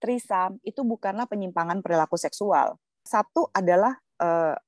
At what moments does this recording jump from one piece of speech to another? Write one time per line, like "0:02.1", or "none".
0:03.0